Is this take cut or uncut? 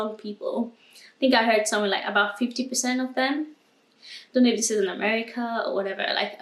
uncut